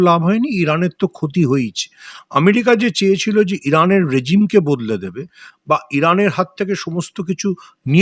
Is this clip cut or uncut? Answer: uncut